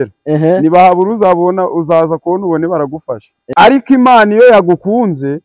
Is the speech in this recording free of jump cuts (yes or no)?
no